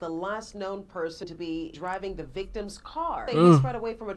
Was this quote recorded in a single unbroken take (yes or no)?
no